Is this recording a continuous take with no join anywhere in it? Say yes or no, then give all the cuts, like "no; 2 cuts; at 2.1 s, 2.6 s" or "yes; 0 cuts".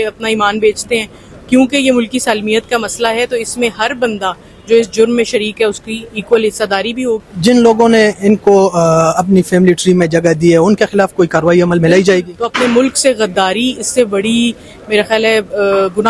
no; 2 cuts; at 7.2 s, 12.3 s